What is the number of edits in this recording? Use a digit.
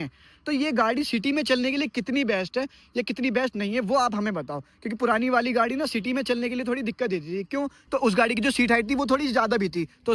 0